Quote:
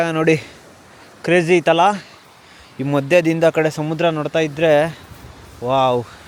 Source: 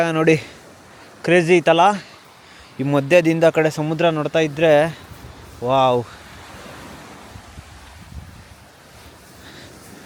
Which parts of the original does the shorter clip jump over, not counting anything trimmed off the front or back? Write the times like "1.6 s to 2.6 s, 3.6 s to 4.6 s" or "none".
none